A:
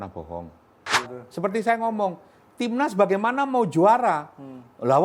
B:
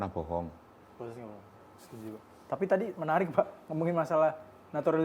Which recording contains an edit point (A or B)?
A